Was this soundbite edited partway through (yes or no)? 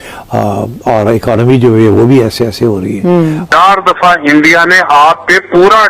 yes